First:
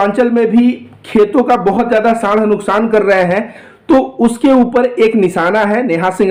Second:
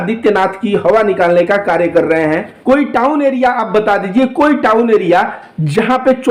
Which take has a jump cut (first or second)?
second